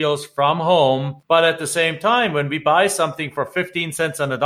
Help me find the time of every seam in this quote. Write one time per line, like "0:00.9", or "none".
0:01.1